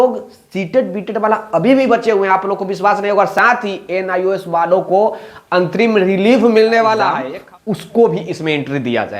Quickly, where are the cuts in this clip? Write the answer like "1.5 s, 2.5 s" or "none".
7.3 s